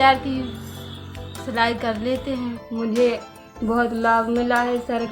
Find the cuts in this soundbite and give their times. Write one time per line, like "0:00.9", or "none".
0:02.6